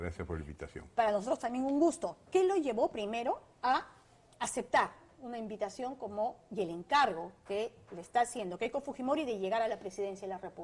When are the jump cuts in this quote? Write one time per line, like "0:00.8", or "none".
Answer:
none

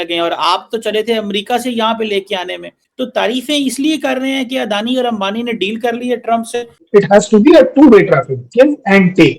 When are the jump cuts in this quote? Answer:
0:06.8

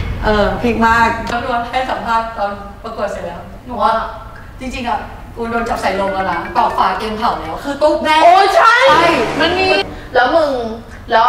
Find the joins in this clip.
0:01.3
0:09.8

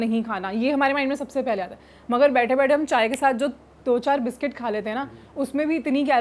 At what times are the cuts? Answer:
none

